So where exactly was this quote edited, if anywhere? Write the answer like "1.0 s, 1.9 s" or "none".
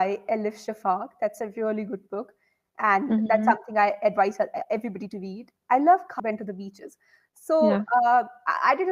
6.2 s